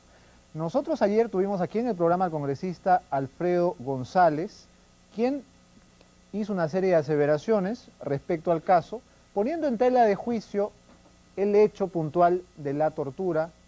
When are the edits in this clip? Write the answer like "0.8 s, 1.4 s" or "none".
8.2 s

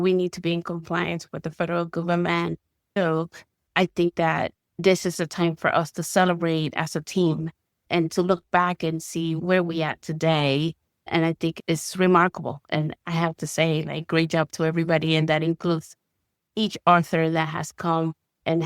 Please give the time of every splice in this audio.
3.0 s

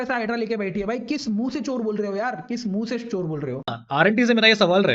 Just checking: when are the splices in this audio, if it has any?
3.8 s

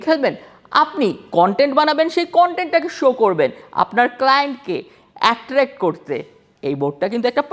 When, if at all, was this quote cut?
none

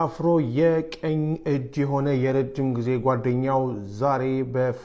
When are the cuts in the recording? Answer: none

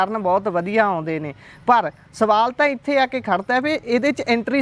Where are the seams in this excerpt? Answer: none

